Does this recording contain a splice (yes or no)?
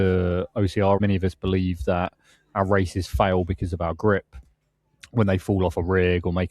yes